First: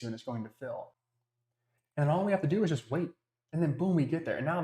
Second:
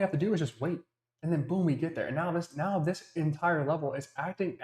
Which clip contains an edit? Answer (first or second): first